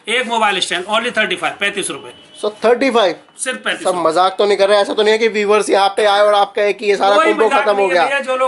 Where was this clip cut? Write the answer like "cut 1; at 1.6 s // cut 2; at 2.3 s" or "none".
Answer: none